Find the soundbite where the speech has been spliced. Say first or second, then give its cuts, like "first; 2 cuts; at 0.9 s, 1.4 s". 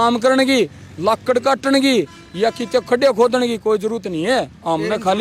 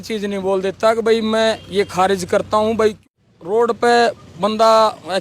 second; 1 cut; at 3.0 s